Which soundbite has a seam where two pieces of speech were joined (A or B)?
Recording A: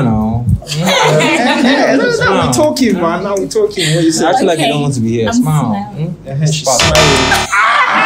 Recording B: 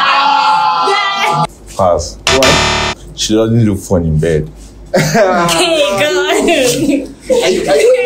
B